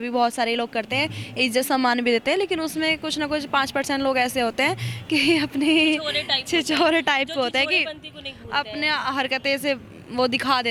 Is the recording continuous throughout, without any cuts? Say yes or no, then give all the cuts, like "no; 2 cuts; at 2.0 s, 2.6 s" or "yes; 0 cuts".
yes; 0 cuts